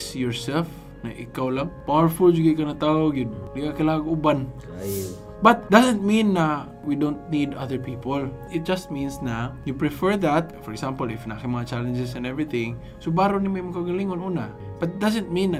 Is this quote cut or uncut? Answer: uncut